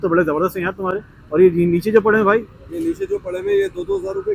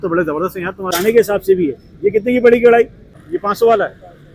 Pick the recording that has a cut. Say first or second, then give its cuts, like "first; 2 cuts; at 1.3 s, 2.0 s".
second; 2 cuts; at 0.9 s, 3.2 s